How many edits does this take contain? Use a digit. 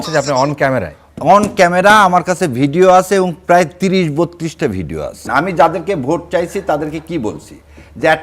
1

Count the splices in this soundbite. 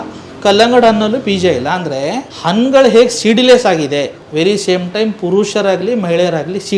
2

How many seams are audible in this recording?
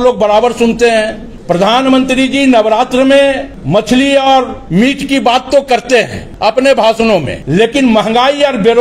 5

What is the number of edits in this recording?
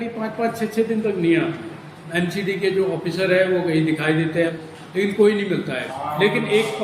3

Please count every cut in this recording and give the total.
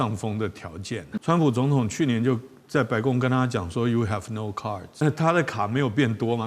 2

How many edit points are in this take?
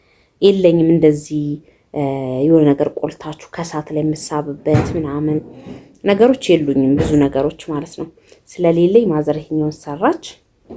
0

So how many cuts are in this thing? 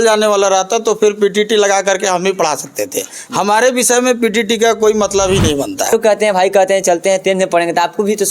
1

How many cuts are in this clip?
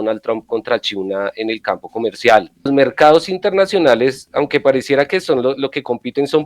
1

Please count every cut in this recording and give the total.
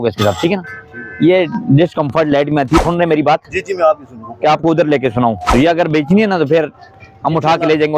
2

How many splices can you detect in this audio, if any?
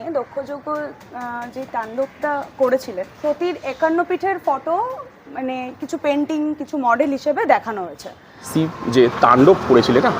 2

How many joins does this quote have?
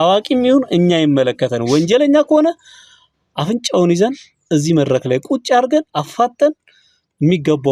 0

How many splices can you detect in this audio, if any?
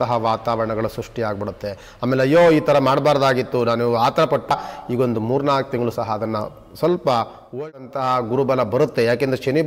2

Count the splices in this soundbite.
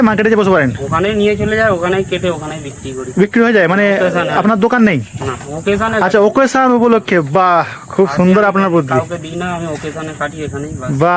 0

